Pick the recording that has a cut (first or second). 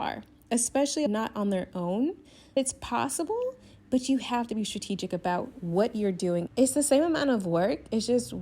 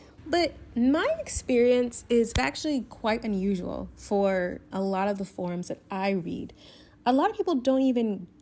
first